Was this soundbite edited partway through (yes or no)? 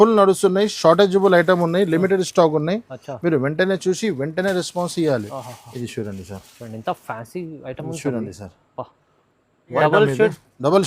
yes